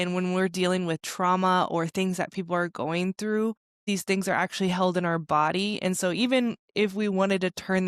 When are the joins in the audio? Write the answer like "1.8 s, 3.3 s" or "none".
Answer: 3.9 s